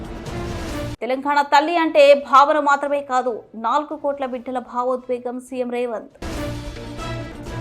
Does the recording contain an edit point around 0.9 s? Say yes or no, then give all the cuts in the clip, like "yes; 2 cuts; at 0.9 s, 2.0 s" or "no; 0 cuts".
yes; 1 cut; at 0.9 s